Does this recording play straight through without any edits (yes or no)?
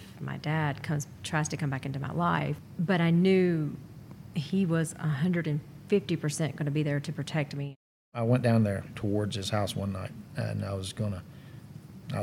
no